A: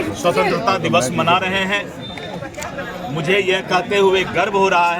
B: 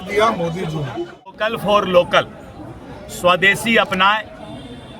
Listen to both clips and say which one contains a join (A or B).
B